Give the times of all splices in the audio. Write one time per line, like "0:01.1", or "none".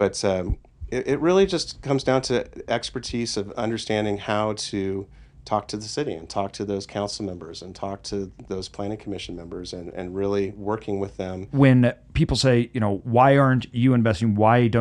0:11.5